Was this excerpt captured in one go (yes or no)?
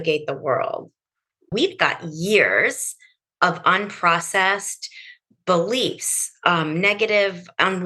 no